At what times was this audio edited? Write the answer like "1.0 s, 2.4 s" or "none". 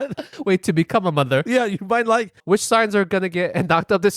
2.3 s